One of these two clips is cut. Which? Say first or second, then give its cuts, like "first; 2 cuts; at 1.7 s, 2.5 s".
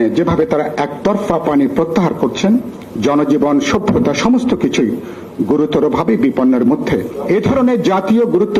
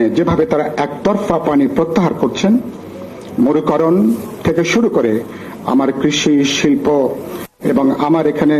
first; 2 cuts; at 2.8 s, 7.1 s